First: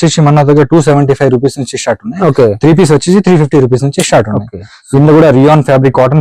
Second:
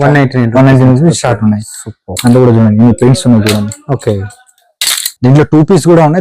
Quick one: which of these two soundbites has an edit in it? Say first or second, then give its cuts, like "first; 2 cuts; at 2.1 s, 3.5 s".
second; 1 cut; at 5.1 s